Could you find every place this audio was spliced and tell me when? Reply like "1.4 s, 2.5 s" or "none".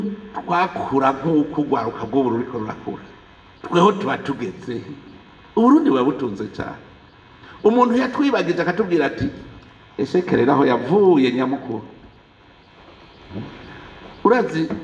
none